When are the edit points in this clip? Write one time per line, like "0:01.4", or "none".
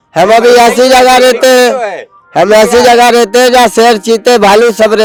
none